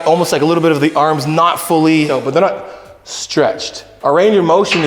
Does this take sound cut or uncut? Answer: cut